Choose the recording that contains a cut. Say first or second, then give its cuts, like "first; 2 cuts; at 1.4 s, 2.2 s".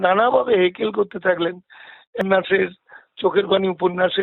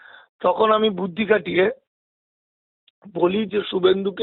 first; 1 cut; at 2.2 s